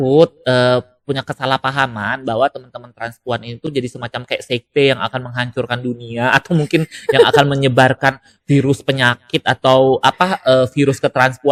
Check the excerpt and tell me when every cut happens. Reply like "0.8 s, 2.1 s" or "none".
none